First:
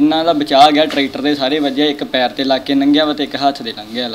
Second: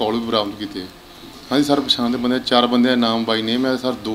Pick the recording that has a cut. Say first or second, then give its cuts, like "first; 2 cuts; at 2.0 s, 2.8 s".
second; 1 cut; at 1.3 s